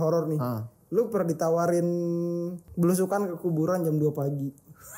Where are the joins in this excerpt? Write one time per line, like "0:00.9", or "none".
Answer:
0:02.6